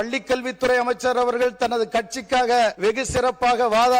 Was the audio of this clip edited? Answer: yes; 1 cut; at 2.8 s

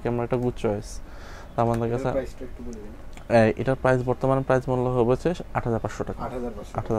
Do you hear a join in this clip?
no; 0 cuts

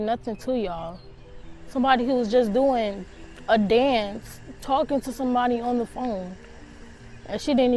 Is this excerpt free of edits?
yes; 0 cuts

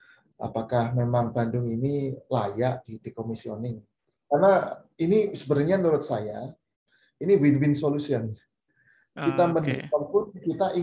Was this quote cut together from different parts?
yes; 1 cut; at 4.1 s

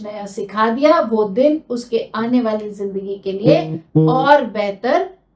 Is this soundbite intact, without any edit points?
yes; 0 cuts

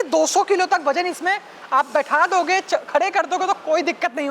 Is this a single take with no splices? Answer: yes; 0 cuts

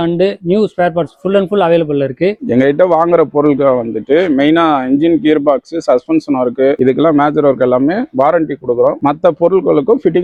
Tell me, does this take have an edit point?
no; 0 cuts

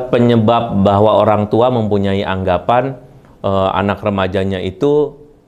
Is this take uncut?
yes; 0 cuts

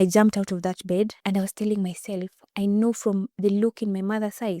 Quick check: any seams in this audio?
yes; 1 cut; at 1.2 s

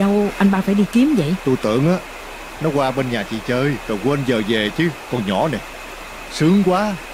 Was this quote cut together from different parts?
no; 0 cuts

